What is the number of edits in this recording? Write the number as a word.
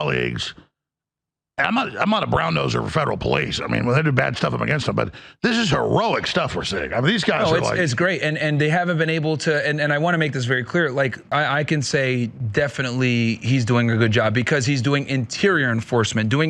one